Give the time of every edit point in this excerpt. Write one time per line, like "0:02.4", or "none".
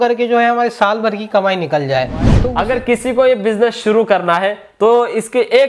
0:02.3